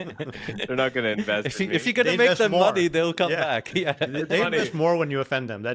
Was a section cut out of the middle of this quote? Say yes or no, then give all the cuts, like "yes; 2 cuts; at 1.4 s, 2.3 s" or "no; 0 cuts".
no; 0 cuts